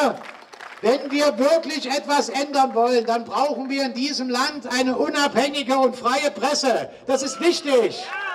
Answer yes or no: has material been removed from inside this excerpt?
no